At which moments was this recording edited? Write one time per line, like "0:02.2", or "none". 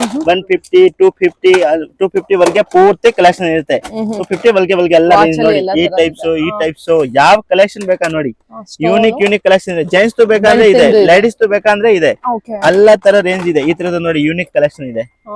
none